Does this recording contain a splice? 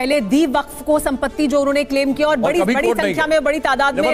no; 0 cuts

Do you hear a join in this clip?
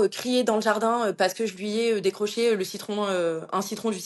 no; 0 cuts

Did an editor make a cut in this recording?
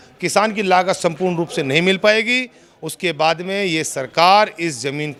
no; 0 cuts

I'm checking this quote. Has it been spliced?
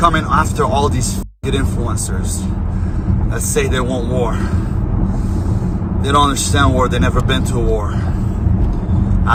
no; 0 cuts

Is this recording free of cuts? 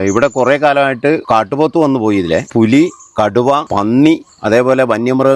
no; 4 cuts; at 1.2 s, 2.5 s, 3.7 s, 4.3 s

